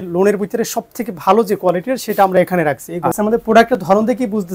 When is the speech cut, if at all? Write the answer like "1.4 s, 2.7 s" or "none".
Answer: 3.1 s